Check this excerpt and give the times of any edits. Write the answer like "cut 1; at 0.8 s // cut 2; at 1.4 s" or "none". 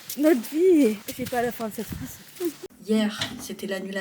cut 1; at 1.1 s // cut 2; at 2.7 s